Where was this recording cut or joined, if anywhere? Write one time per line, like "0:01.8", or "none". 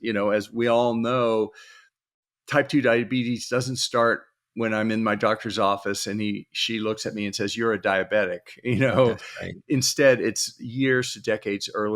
none